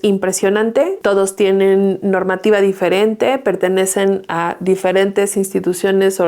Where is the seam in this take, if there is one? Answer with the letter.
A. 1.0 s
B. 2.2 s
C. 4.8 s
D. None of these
A